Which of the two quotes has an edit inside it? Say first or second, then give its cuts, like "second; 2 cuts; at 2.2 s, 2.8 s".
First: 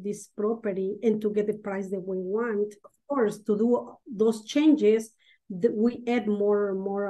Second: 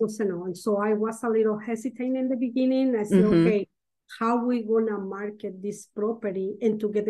first; 1 cut; at 2.9 s